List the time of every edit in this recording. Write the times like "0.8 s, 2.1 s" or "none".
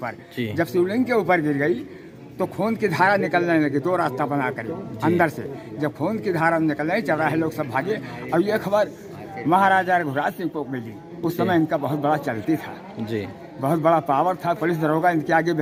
none